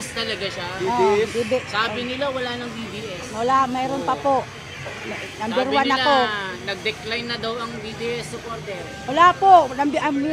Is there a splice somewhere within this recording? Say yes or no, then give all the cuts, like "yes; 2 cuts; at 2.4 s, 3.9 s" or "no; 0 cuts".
no; 0 cuts